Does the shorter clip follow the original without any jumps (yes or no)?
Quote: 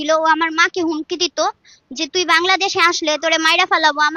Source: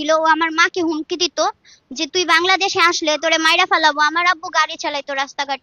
yes